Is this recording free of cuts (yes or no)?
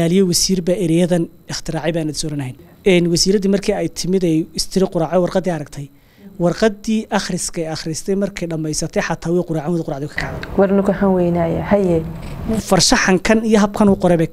no